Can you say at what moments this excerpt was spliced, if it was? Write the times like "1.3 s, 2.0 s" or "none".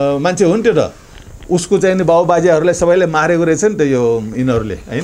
none